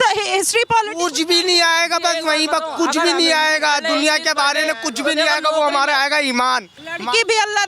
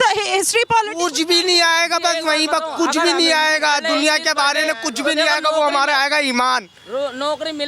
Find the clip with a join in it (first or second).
first